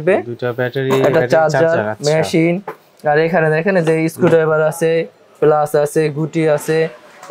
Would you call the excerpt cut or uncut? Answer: uncut